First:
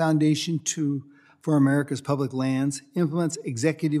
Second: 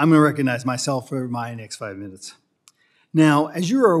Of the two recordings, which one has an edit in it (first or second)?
first